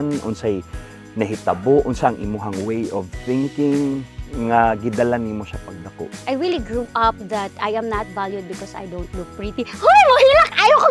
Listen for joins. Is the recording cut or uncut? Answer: uncut